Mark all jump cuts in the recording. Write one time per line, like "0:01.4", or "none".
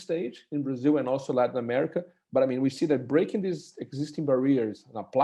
none